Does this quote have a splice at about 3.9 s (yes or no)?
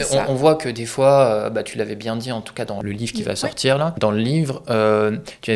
yes